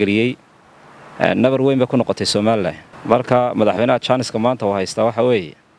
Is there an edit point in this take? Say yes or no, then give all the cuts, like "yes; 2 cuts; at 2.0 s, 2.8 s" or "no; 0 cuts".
yes; 1 cut; at 2.9 s